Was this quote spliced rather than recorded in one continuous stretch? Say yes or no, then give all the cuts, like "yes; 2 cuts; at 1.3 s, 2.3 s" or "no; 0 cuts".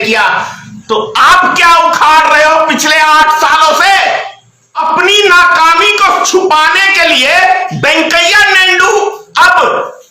yes; 1 cut; at 4.8 s